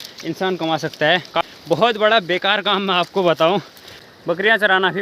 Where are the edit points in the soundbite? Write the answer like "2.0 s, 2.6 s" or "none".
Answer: 1.0 s, 3.9 s